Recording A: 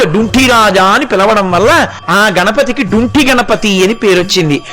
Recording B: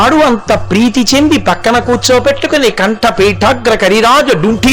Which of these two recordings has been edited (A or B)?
A